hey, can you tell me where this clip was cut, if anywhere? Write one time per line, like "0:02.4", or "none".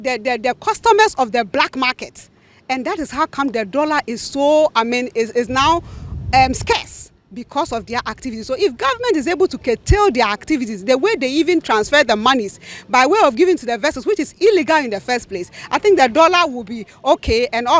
none